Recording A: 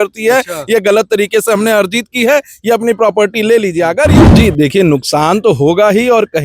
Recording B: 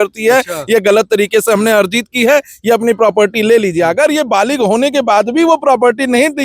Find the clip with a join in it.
A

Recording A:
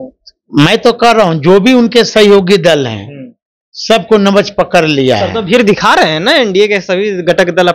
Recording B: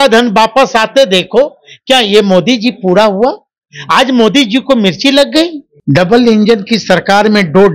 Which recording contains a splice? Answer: B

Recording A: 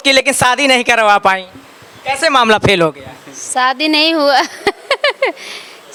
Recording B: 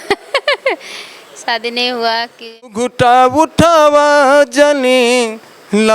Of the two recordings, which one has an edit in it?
B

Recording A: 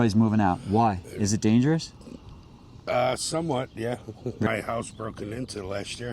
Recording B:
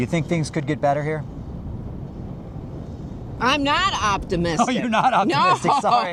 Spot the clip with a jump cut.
A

